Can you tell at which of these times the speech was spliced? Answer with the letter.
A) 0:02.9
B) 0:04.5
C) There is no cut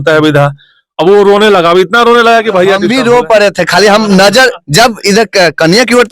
A